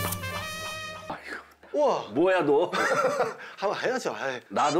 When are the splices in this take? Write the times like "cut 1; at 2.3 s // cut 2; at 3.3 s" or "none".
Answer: cut 1; at 1.1 s